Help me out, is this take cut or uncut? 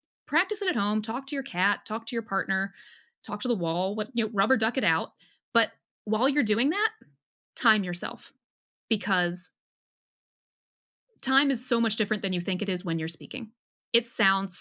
uncut